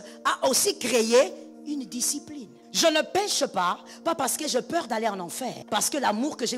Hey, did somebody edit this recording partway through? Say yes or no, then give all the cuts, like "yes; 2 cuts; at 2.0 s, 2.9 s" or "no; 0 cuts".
yes; 2 cuts; at 2.6 s, 5.6 s